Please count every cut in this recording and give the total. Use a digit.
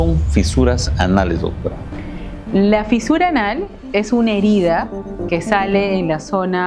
0